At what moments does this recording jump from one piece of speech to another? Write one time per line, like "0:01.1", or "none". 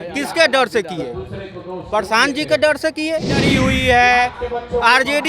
0:03.4

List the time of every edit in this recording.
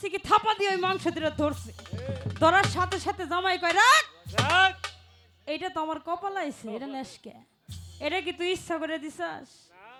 none

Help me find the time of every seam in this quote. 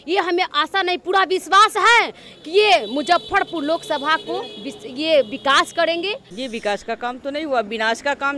0:06.3

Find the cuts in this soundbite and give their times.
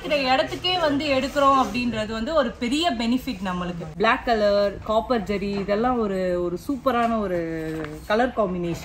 0:03.8

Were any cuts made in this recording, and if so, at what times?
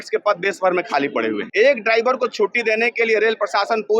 0:01.4

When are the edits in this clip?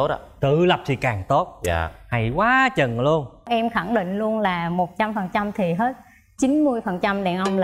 0:03.5

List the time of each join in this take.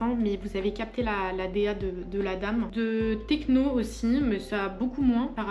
none

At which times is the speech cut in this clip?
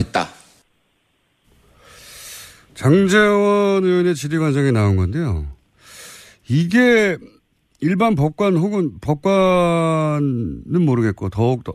0:10.3

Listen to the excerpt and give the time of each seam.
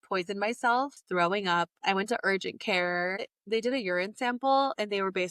0:01.0

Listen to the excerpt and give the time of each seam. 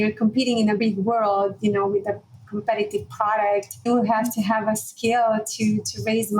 0:00.8
0:03.9

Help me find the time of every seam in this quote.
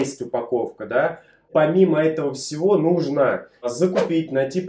0:01.5
0:03.7

